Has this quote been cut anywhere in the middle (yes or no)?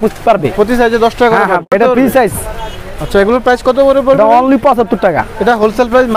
yes